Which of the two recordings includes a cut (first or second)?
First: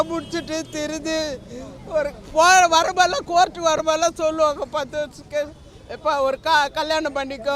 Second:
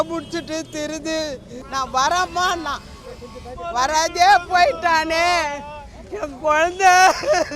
second